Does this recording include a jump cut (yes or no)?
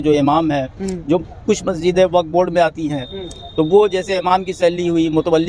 no